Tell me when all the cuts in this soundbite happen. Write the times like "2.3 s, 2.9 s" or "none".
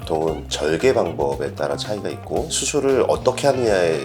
2.6 s